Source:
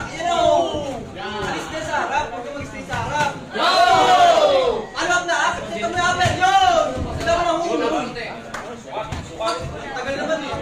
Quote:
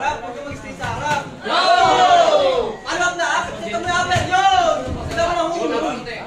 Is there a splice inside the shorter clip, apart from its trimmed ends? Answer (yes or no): no